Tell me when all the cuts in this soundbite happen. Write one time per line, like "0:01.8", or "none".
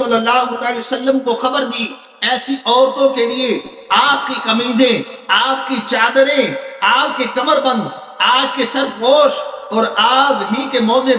none